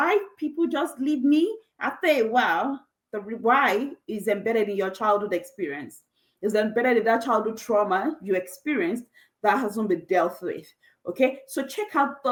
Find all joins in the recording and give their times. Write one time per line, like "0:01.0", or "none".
none